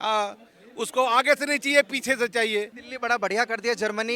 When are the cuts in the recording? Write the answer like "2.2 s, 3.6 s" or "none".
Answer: 2.8 s